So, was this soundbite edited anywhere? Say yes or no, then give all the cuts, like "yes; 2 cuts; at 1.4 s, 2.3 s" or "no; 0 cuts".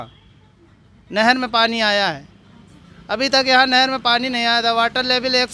no; 0 cuts